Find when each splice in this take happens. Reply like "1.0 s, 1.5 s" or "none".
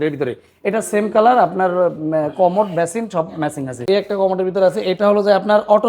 3.8 s